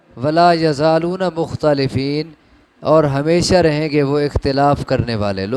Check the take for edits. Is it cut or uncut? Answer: uncut